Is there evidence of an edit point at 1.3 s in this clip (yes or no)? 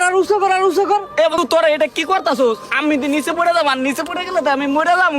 yes